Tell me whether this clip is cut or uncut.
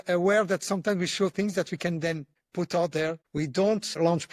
cut